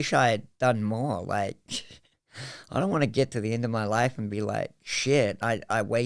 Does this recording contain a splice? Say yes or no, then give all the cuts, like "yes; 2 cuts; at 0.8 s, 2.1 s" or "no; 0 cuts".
no; 0 cuts